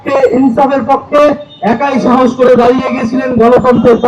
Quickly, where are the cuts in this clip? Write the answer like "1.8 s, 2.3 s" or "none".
none